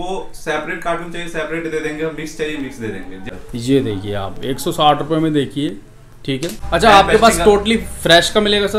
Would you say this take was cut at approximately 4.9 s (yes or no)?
no